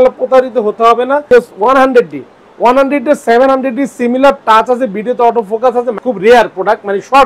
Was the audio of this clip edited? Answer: yes; 2 cuts; at 1.2 s, 6.0 s

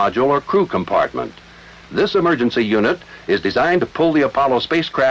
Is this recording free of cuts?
yes; 0 cuts

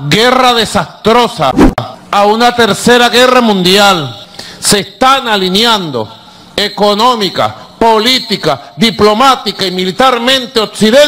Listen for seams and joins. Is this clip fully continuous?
no; 1 cut; at 4.0 s

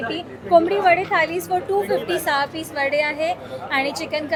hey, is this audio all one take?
yes; 0 cuts

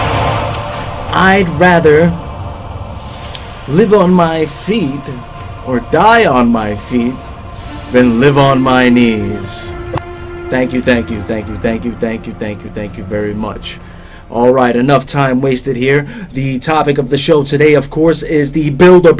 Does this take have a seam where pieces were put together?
yes; 1 cut; at 13.4 s

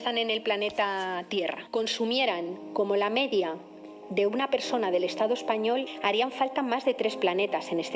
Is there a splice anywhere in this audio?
yes; 2 cuts; at 1.6 s, 5.9 s

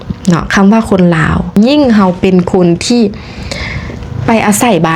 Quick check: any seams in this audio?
yes; 1 cut; at 1.5 s

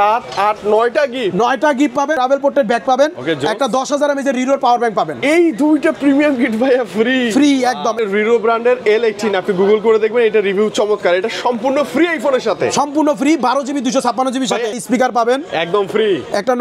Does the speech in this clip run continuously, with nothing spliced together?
no; 3 cuts; at 2.2 s, 8.0 s, 14.8 s

